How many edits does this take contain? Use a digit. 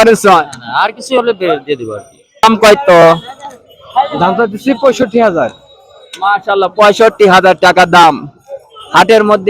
1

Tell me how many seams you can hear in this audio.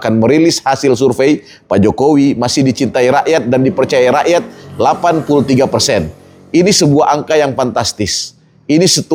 0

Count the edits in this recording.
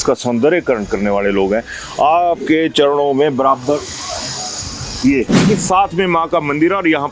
1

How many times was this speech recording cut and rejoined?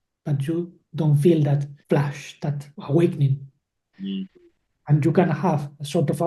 2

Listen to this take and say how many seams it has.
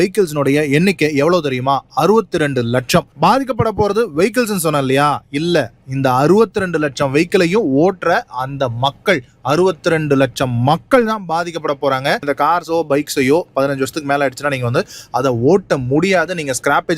2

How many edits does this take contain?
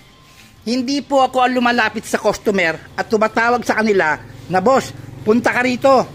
0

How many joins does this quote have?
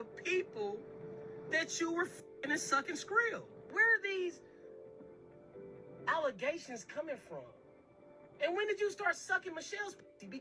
1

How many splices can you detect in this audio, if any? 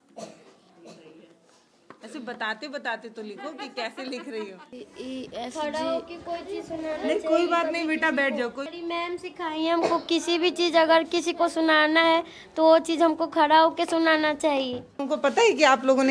3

